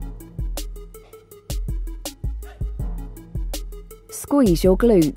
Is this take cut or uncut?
cut